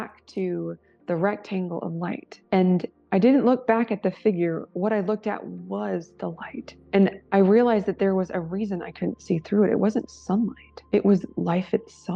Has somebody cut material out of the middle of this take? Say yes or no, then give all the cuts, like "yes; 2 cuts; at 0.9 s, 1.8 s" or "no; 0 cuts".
no; 0 cuts